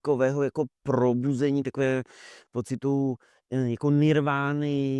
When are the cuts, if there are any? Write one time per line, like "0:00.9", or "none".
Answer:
none